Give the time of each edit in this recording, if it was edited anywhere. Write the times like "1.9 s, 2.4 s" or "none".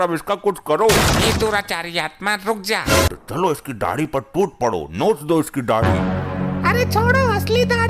3.1 s